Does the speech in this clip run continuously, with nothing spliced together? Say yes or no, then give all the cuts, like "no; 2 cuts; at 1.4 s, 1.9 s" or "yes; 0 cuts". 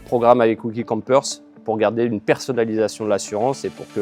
yes; 0 cuts